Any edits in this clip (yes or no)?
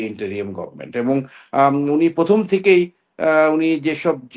no